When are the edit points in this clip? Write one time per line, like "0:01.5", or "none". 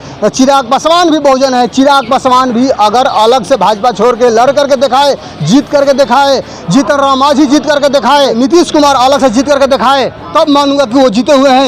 0:08.3
0:10.2